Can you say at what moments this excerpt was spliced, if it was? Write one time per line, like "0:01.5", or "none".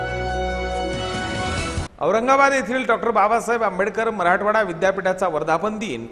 0:01.8